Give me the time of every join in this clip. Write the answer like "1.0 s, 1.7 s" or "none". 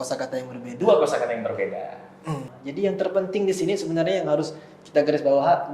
2.5 s